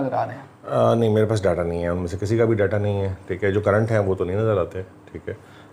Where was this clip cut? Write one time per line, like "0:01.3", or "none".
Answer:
none